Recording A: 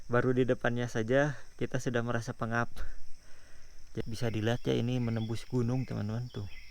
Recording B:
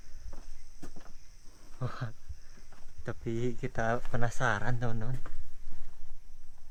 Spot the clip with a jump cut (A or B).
A